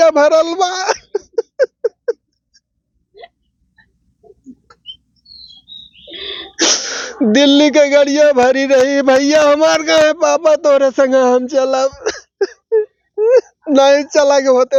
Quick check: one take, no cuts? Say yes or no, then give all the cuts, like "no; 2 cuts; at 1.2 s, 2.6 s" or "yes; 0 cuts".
yes; 0 cuts